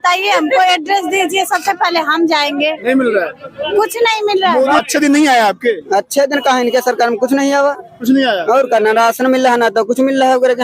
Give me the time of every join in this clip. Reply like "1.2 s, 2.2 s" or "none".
4.8 s